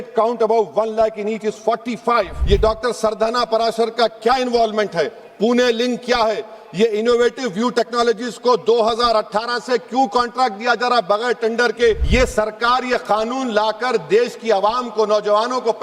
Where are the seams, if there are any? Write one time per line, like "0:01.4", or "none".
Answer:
0:02.4
0:12.0